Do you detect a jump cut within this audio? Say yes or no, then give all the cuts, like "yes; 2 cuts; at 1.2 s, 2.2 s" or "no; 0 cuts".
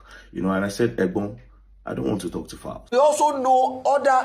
yes; 1 cut; at 3.0 s